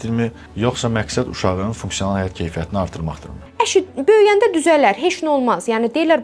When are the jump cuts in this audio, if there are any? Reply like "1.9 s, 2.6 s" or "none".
3.4 s